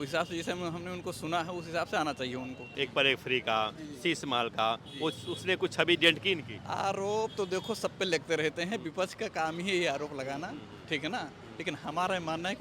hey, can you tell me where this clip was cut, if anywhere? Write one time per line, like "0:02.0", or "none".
0:02.6